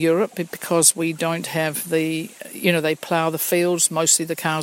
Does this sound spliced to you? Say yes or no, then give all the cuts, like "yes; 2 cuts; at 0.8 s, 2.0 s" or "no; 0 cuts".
no; 0 cuts